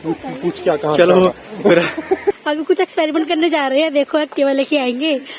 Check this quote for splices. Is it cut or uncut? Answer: cut